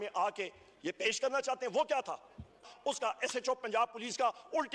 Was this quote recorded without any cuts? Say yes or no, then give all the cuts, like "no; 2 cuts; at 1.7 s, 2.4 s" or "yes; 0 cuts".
no; 1 cut; at 2.7 s